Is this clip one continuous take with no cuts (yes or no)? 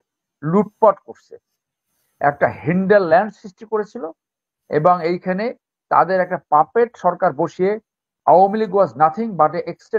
yes